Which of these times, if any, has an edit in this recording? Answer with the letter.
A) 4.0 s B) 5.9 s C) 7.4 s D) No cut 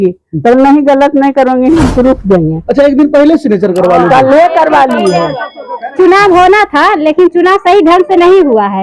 B